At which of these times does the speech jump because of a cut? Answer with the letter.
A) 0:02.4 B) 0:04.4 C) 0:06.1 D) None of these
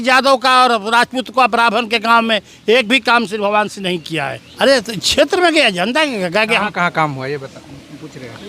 B